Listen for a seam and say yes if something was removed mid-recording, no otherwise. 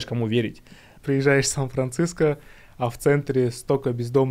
yes